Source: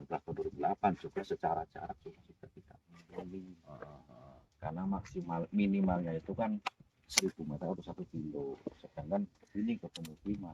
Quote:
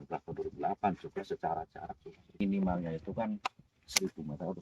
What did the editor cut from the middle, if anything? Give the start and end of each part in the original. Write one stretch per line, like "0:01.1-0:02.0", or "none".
0:02.4-0:05.6